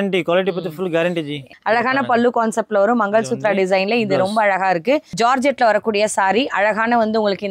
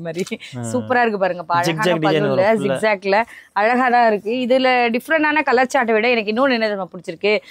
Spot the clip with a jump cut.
first; 2 cuts; at 1.5 s, 5.1 s

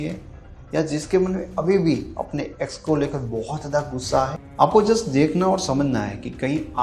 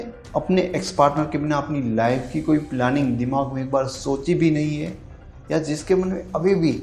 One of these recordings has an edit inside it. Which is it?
first; 1 cut; at 4.4 s

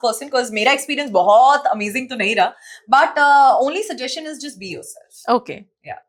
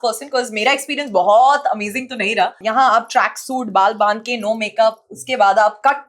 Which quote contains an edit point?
second; 1 cut; at 2.6 s

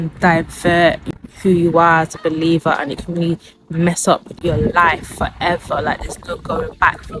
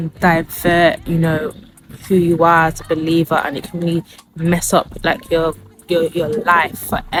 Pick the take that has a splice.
first; 2 cuts; at 1.0 s, 4.4 s

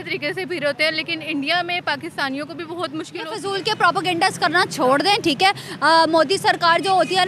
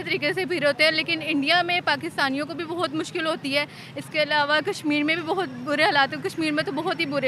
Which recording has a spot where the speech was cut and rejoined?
first; 1 cut; at 3.4 s

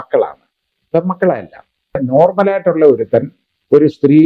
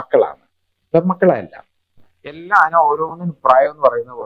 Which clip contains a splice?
first; 1 cut; at 2.0 s

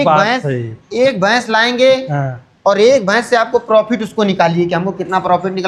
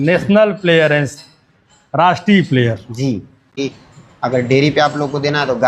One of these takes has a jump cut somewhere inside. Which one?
second; 1 cut; at 3.5 s

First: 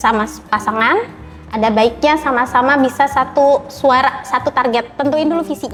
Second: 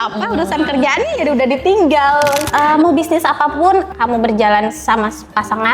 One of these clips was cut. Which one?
second; 2 cuts; at 2.5 s, 3.9 s

